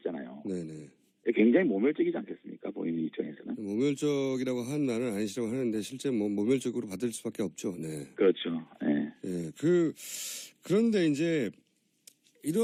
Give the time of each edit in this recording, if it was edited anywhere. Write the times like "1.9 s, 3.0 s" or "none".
none